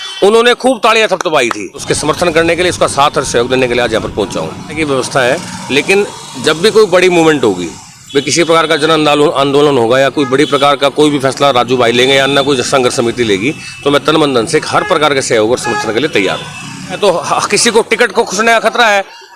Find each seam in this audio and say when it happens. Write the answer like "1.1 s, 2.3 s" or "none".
1.9 s, 4.8 s, 17.0 s